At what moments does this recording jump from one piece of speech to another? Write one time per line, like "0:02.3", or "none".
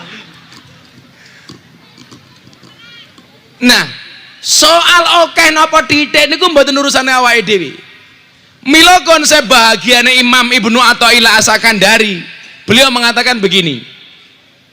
0:02.6